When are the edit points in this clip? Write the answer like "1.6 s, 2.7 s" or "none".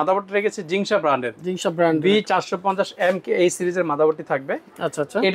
none